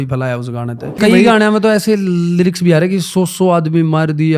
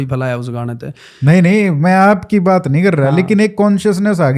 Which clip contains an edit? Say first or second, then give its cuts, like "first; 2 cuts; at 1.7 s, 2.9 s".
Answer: first; 1 cut; at 1.0 s